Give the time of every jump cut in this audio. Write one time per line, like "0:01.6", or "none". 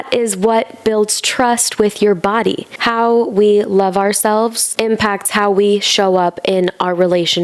0:02.7
0:04.6